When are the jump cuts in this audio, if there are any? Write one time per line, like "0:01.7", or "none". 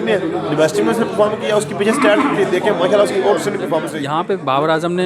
0:04.0